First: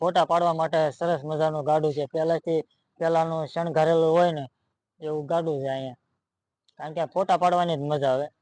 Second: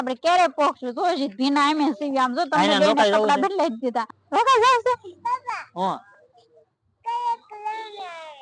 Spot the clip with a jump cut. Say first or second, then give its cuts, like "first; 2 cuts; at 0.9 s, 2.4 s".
second; 1 cut; at 4.1 s